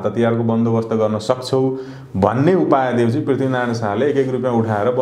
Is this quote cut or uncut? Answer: uncut